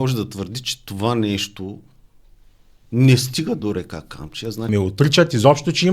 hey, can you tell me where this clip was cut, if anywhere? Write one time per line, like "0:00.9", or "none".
0:04.7